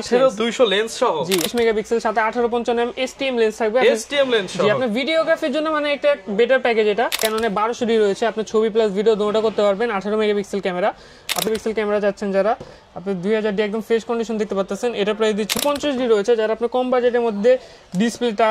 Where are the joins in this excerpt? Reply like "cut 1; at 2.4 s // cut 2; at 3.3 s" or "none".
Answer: cut 1; at 1.5 s // cut 2; at 7.2 s // cut 3; at 11.5 s // cut 4; at 15.5 s

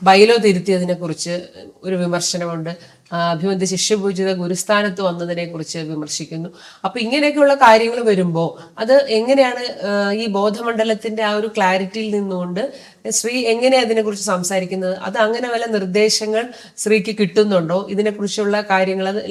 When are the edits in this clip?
none

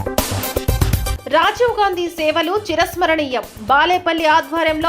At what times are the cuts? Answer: cut 1; at 1.2 s

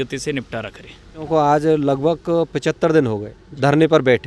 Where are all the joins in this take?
cut 1; at 1.2 s

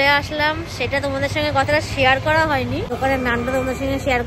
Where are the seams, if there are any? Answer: cut 1; at 2.9 s

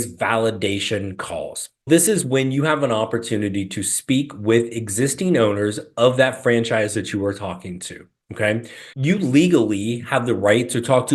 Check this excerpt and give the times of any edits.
cut 1; at 1.9 s // cut 2; at 8.8 s

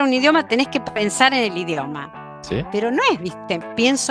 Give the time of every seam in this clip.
none

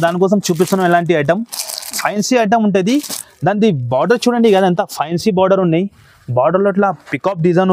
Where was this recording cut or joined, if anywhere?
none

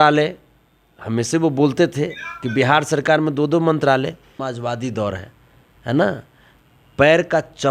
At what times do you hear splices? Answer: cut 1; at 4.3 s

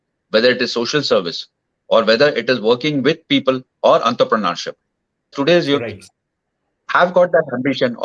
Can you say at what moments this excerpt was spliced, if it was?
cut 1; at 5.3 s

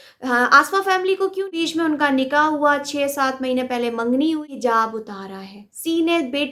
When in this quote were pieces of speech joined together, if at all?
cut 1; at 1.5 s // cut 2; at 4.4 s

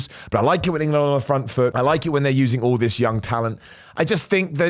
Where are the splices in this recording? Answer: cut 1; at 1.7 s

